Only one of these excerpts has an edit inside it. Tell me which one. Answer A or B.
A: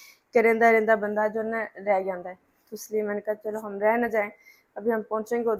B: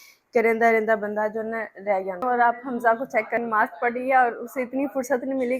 B